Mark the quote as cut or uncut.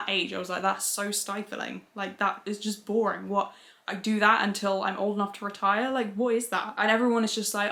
uncut